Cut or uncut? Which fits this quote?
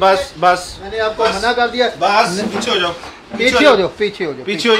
uncut